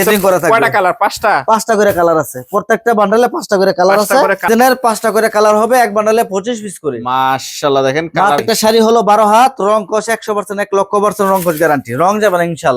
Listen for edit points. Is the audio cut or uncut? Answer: cut